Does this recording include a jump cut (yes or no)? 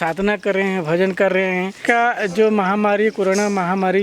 yes